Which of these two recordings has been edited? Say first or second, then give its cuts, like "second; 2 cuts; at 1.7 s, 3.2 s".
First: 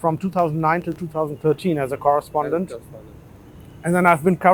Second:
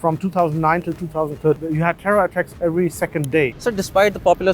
second; 2 cuts; at 1.6 s, 3.6 s